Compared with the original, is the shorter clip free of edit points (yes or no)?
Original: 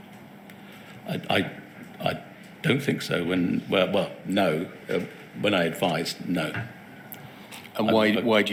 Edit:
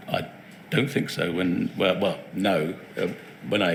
yes